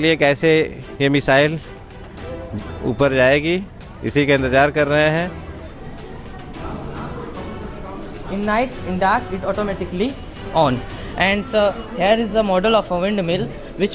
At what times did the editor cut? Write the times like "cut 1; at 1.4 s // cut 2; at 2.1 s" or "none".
cut 1; at 5.8 s